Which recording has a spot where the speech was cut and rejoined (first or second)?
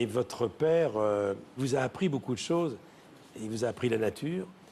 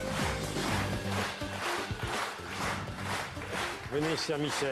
first